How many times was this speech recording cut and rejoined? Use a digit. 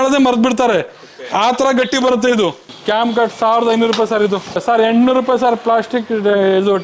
2